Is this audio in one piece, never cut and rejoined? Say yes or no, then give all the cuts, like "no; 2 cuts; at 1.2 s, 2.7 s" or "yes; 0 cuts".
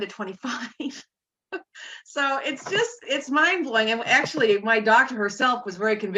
yes; 0 cuts